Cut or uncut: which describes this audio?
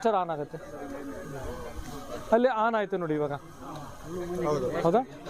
uncut